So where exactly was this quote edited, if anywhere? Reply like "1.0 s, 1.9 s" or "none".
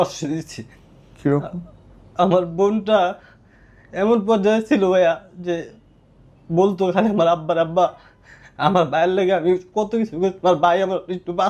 none